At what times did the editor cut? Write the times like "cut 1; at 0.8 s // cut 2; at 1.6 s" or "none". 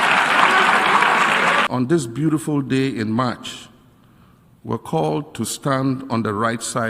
cut 1; at 1.7 s